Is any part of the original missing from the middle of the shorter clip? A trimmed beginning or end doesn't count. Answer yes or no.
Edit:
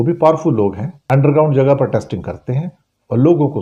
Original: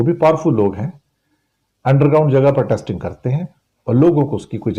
yes